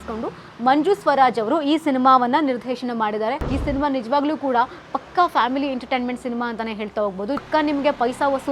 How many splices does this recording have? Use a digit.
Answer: 2